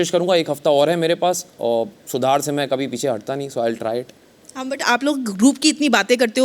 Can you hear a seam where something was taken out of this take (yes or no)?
no